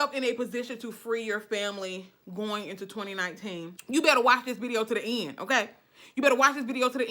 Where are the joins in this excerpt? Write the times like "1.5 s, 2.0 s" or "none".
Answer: 3.7 s